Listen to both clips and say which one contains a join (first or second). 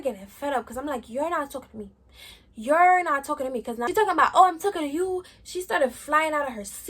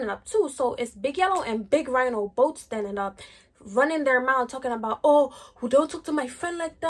first